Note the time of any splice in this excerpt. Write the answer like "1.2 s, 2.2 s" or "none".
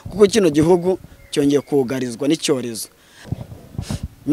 3.2 s